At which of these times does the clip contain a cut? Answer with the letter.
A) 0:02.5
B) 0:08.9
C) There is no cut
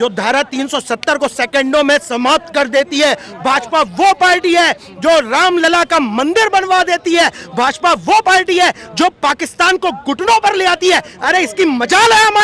C